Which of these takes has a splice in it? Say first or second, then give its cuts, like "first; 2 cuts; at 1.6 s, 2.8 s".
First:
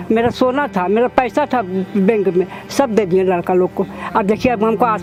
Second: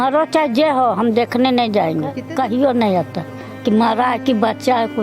second; 1 cut; at 2.2 s